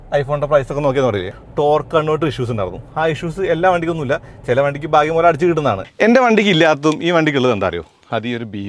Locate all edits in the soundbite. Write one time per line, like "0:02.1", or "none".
0:01.3
0:05.9